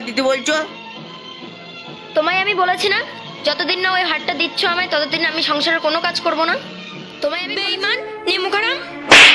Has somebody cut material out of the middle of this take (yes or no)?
yes